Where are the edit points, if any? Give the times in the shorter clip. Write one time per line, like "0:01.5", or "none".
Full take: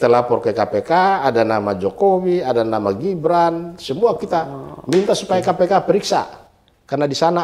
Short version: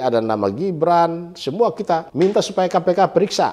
0:02.1